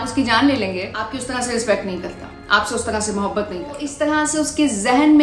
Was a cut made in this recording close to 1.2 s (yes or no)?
yes